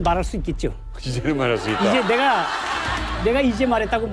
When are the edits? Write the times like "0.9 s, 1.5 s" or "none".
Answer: none